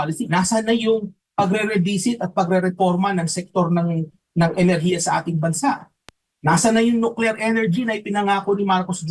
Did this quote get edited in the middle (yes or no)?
no